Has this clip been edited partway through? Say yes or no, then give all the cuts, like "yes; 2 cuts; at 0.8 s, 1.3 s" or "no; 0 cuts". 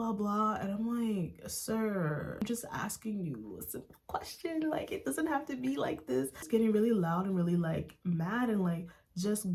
no; 0 cuts